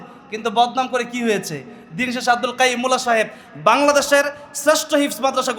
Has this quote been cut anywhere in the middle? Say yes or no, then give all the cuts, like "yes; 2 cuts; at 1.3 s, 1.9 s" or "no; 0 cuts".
no; 0 cuts